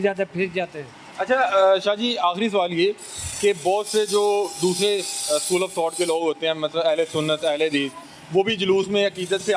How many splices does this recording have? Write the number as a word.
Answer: zero